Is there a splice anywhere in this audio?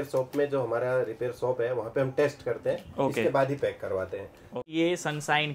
yes; 1 cut; at 4.5 s

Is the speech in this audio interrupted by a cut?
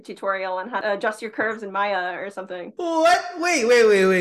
yes; 2 cuts; at 0.8 s, 2.7 s

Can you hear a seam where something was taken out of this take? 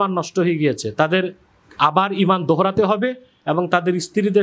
no; 0 cuts

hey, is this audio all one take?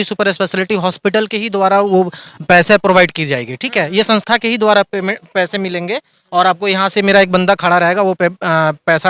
yes; 0 cuts

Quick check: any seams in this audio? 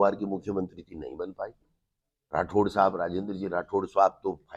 no; 0 cuts

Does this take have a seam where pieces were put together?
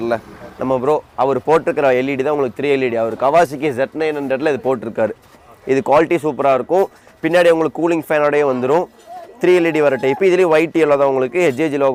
no; 0 cuts

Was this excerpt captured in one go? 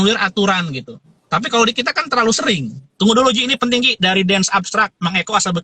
no; 1 cut; at 2.8 s

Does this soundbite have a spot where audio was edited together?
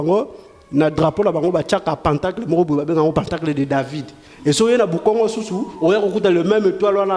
no; 0 cuts

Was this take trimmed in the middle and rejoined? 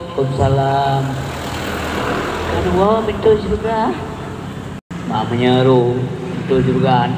yes; 1 cut; at 4.8 s

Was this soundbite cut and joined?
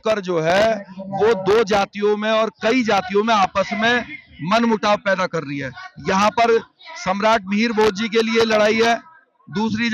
no; 0 cuts

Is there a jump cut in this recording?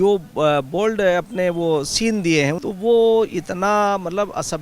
yes; 1 cut; at 2.6 s

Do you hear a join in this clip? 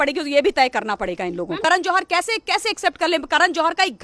yes; 1 cut; at 1.6 s

